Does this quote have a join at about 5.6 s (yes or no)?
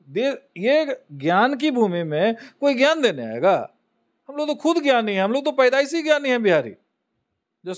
no